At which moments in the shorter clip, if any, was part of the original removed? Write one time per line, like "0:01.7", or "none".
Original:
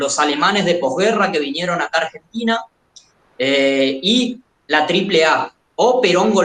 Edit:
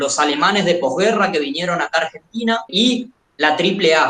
0:02.7

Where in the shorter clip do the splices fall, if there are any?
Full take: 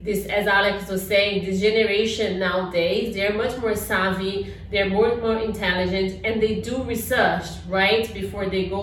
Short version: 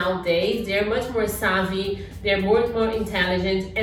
none

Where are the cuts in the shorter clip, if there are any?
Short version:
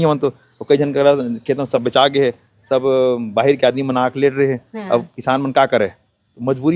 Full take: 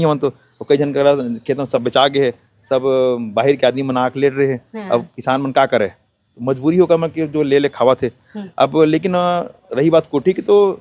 none

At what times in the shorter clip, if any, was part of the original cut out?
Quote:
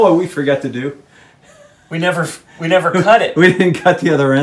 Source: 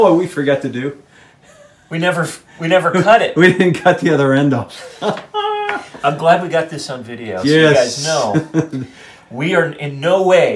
none

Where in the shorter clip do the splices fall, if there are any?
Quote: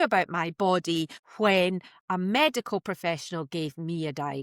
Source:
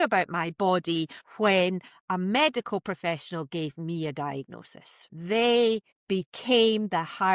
none

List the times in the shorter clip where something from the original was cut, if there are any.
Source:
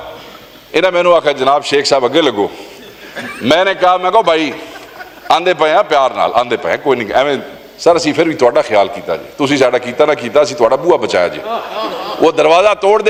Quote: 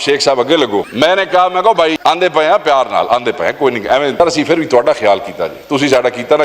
0:00.9
0:02.0
0:04.2

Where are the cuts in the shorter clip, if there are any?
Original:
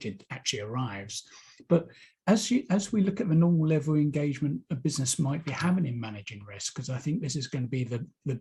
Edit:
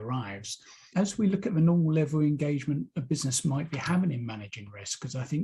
0:00.9

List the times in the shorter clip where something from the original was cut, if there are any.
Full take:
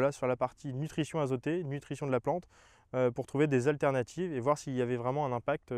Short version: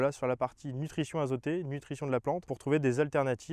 0:02.5

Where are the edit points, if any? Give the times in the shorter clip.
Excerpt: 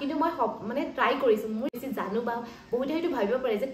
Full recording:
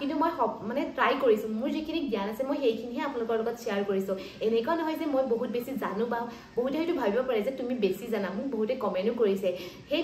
0:01.7

